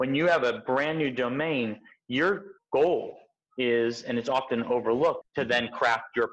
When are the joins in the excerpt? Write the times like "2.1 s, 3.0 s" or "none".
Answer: 5.2 s